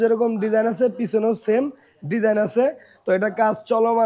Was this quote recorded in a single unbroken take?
yes; 0 cuts

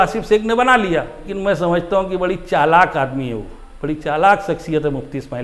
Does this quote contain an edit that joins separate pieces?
yes; 1 cut; at 1.3 s

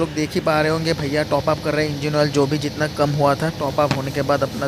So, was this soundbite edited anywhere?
no; 0 cuts

